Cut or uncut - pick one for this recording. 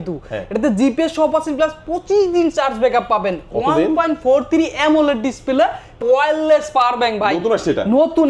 cut